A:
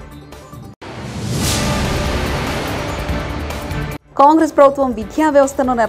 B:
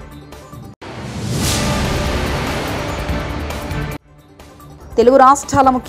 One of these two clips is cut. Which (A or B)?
B